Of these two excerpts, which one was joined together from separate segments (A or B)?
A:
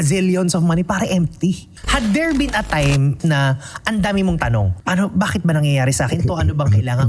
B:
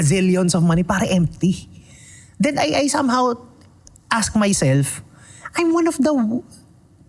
A